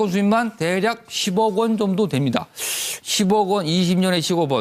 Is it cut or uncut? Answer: cut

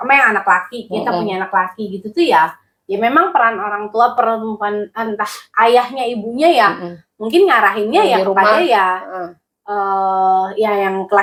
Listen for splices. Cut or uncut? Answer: uncut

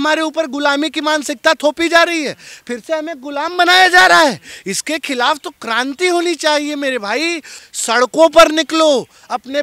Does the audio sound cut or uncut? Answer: cut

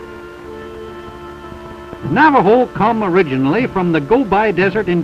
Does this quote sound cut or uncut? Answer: cut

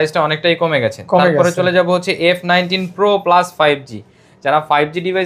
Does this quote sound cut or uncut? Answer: uncut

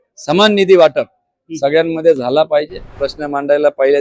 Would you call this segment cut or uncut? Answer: cut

